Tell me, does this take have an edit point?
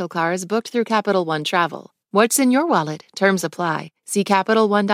yes; 1 cut; at 1.9 s

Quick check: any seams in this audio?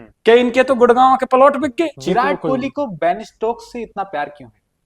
yes; 1 cut; at 2.0 s

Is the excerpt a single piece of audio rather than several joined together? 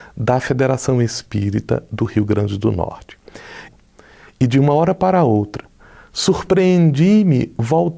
yes; 0 cuts

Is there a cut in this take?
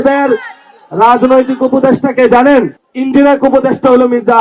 yes; 1 cut; at 2.8 s

